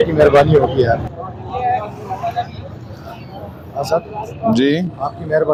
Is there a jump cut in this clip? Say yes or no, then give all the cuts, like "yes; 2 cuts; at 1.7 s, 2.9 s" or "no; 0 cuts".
no; 0 cuts